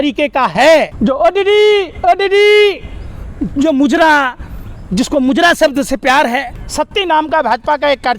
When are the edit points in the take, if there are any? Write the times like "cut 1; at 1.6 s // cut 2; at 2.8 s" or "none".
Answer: cut 1; at 0.9 s // cut 2; at 6.5 s